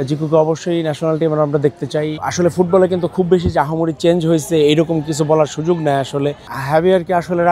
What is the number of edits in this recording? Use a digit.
2